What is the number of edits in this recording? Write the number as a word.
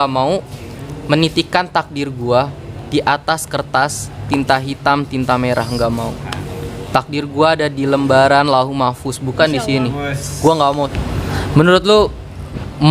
one